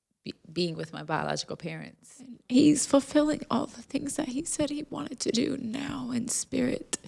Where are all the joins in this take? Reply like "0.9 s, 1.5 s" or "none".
2.3 s